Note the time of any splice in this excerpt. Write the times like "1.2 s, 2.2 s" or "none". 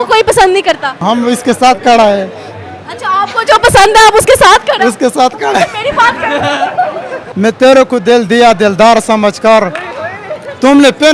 1.0 s, 7.2 s